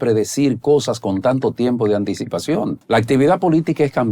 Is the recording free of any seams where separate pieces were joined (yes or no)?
no